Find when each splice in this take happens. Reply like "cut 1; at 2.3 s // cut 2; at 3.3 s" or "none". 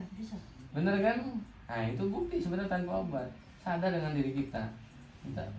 none